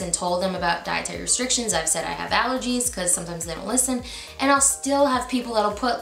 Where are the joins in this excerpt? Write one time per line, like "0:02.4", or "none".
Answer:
none

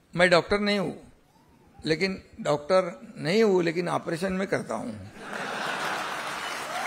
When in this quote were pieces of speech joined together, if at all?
none

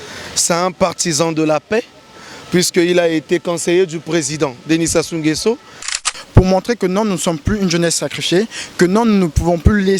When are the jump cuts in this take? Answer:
0:06.0

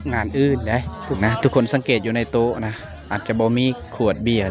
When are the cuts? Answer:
0:01.2

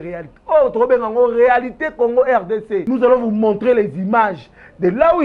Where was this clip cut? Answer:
0:02.8

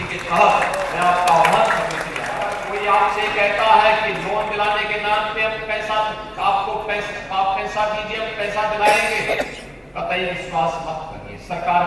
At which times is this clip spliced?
0:02.4

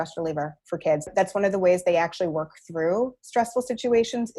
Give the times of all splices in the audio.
0:01.0

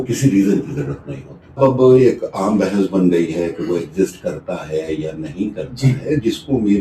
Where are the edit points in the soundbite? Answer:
0:01.6

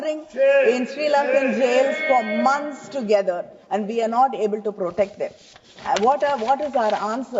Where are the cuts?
none

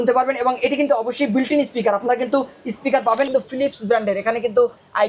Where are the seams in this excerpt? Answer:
0:03.3

